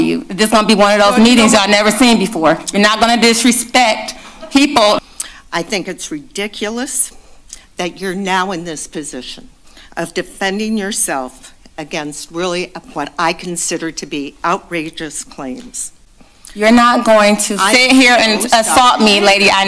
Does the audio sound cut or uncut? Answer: cut